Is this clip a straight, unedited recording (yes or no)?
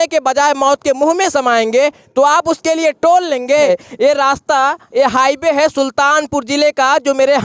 no